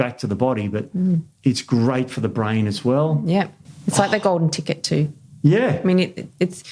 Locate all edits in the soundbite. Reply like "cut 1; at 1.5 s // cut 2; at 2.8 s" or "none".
cut 1; at 3.7 s